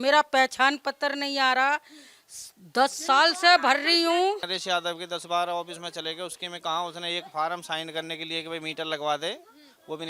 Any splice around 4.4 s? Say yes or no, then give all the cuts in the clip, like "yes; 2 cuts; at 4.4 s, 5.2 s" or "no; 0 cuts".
yes; 1 cut; at 4.4 s